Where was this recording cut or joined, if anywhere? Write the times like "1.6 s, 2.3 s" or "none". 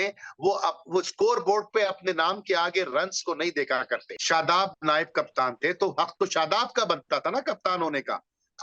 4.1 s